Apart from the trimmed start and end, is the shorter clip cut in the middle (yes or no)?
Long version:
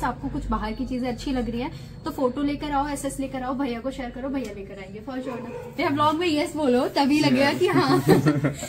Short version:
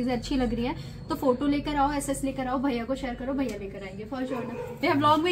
no